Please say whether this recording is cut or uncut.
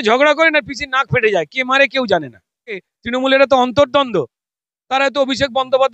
cut